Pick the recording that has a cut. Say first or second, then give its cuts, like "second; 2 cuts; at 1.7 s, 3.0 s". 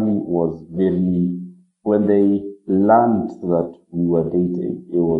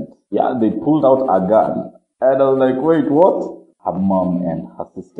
second; 1 cut; at 3.6 s